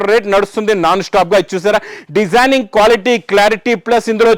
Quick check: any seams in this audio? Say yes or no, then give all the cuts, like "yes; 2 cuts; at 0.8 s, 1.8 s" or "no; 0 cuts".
no; 0 cuts